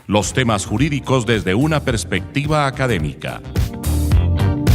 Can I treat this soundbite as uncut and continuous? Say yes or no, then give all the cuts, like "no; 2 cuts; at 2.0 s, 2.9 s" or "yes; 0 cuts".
no; 1 cut; at 3.5 s